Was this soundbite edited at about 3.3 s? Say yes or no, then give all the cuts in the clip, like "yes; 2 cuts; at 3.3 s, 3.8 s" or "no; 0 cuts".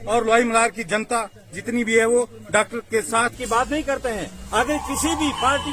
yes; 1 cut; at 3.3 s